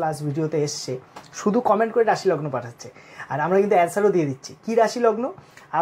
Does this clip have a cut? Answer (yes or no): no